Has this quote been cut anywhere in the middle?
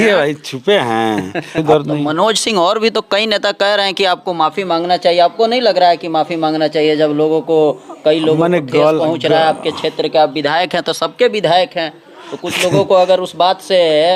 yes; 1 cut; at 1.6 s

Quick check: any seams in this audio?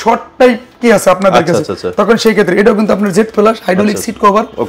no; 0 cuts

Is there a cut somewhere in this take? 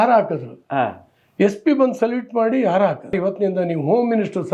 yes; 1 cut; at 3.2 s

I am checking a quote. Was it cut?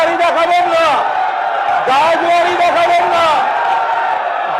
no; 0 cuts

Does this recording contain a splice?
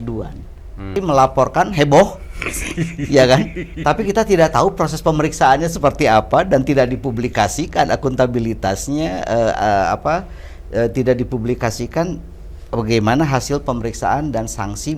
yes; 1 cut; at 0.9 s

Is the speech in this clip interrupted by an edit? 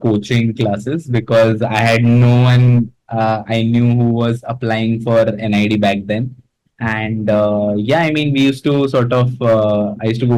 no; 0 cuts

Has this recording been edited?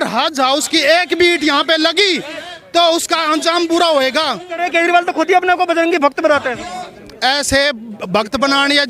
yes; 1 cut; at 4.6 s

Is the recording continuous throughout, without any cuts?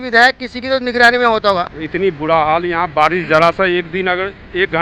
no; 1 cut; at 1.6 s

